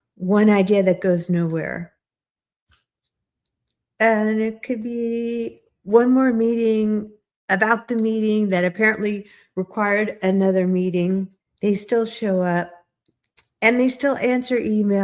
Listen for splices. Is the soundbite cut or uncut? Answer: cut